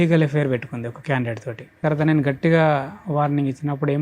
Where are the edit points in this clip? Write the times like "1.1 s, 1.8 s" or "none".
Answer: 1.8 s

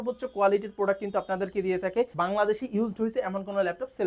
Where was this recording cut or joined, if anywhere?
2.1 s

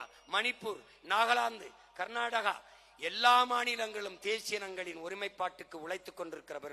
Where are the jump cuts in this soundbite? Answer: none

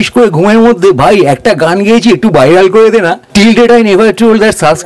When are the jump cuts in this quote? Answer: 3.2 s

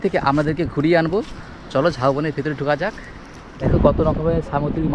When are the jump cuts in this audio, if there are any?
3.7 s

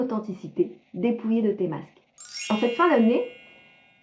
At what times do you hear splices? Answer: 2.5 s

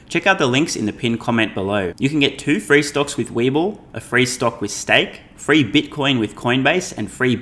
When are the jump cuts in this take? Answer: none

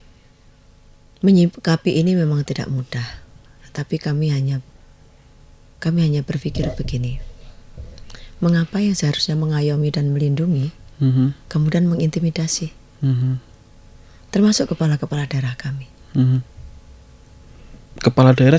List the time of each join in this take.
none

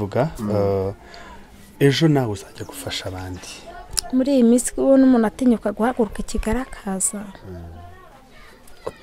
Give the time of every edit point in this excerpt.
3.7 s

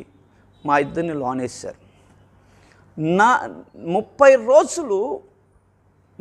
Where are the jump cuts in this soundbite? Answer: none

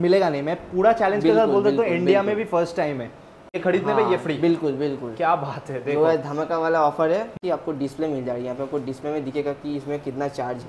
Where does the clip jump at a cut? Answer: 3.5 s, 7.4 s

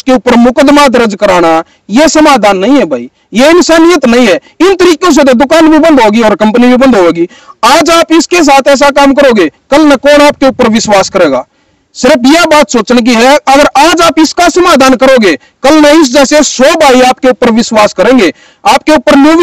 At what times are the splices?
none

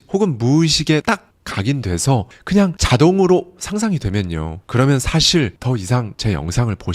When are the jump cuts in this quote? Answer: 1.0 s, 5.8 s

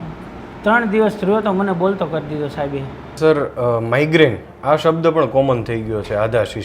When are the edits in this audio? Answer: 3.2 s

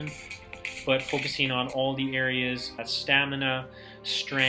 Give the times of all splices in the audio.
2.9 s

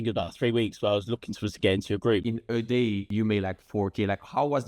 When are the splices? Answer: 2.2 s

